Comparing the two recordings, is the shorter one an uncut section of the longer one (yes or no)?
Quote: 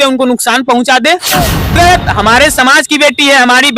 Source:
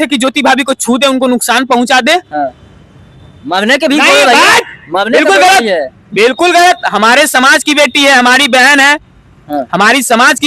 no